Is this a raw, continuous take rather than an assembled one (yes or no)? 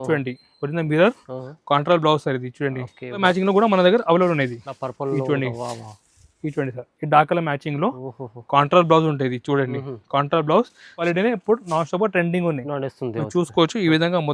no